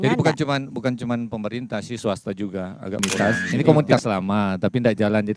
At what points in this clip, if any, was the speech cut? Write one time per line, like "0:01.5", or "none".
0:03.1

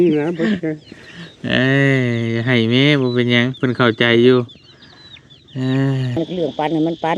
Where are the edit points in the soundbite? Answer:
0:06.2

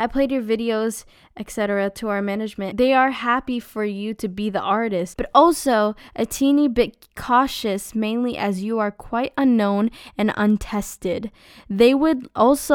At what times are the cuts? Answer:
0:02.7
0:05.2

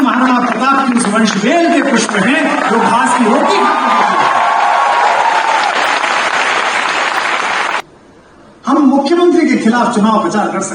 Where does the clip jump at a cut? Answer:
0:07.8

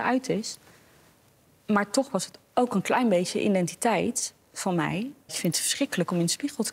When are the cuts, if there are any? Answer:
0:05.3

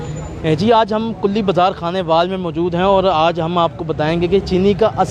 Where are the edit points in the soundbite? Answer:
none

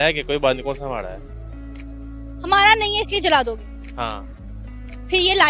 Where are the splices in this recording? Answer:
0:04.6

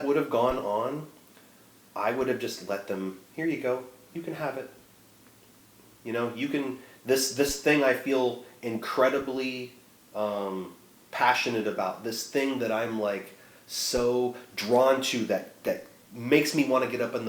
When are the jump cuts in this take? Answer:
none

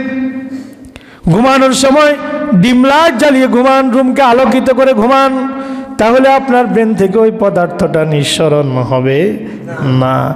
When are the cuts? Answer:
0:03.6

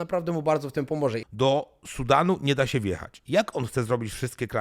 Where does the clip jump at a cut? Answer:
0:01.2
0:03.1

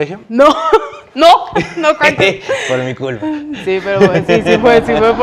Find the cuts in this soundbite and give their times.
none

